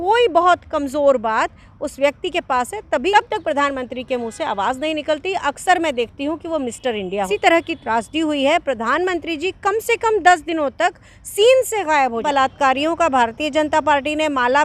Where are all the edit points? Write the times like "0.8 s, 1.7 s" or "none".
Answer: 3.1 s, 7.3 s, 12.2 s